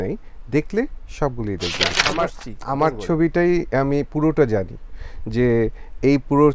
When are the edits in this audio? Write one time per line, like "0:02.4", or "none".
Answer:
0:02.0

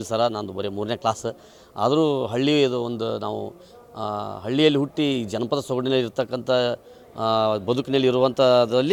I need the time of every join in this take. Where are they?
none

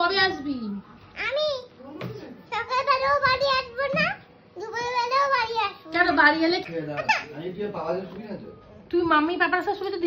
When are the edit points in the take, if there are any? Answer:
0:06.7

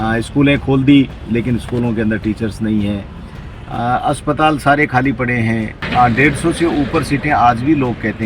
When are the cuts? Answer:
0:05.8

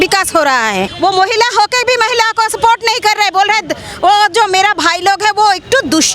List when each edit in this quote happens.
0:00.9

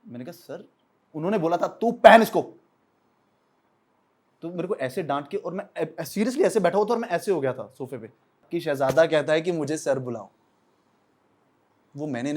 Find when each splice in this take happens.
0:08.5

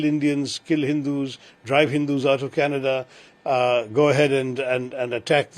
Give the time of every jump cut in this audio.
none

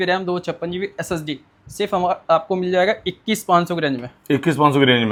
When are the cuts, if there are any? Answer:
none

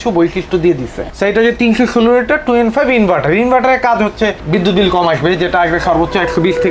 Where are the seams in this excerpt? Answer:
0:01.1

